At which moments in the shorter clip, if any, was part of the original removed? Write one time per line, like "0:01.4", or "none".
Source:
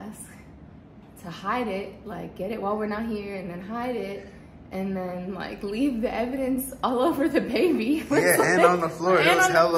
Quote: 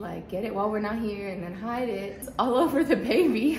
0:02.3